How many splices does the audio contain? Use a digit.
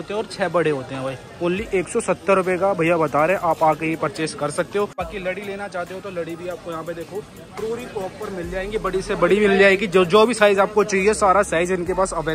1